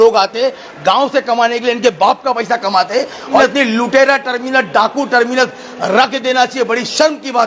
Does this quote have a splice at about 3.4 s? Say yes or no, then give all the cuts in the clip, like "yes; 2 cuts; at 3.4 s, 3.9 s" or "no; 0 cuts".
yes; 1 cut; at 3.4 s